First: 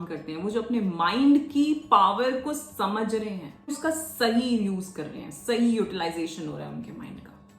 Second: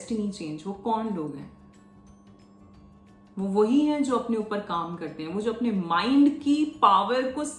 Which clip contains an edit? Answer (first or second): first